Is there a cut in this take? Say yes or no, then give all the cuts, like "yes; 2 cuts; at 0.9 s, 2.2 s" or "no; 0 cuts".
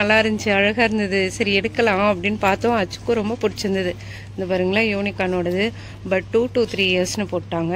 no; 0 cuts